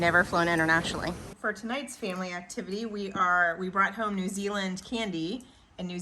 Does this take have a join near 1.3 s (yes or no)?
yes